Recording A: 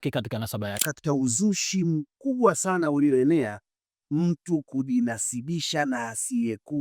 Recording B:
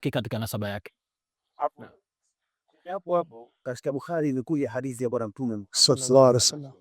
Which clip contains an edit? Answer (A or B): A